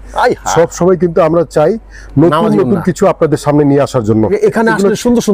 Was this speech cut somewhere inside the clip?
yes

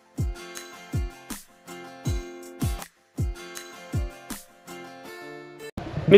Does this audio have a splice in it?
no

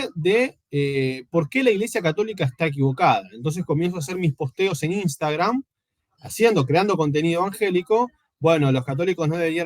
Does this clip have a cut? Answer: no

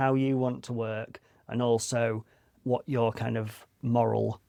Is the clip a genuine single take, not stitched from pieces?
yes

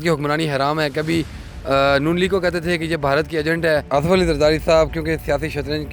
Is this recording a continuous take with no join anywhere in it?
no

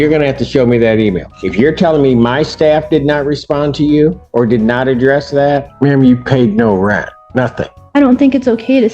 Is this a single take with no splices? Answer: no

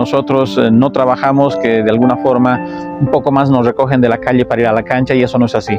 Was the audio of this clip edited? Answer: no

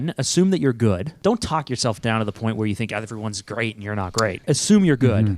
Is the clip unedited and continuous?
no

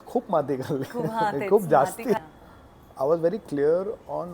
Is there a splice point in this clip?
yes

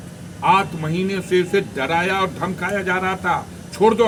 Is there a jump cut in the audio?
no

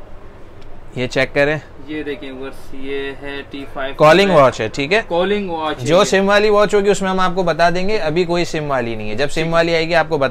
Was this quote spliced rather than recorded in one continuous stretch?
no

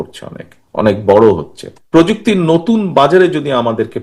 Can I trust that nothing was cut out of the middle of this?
no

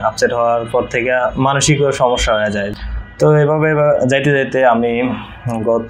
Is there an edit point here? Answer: yes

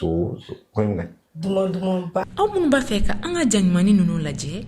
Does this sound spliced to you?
yes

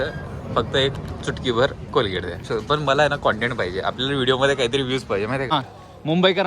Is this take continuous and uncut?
no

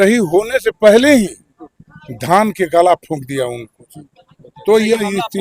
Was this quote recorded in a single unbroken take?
yes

